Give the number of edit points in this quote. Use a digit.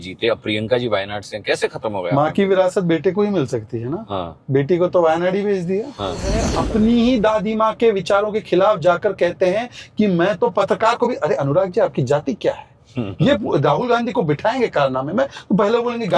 1